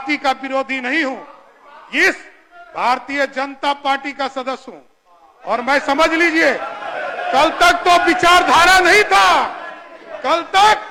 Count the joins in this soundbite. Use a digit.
0